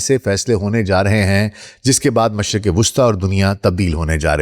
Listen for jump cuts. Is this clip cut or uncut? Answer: uncut